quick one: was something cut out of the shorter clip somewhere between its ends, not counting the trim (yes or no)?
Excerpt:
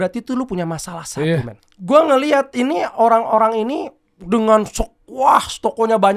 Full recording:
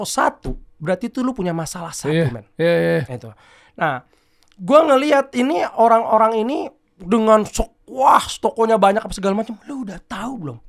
yes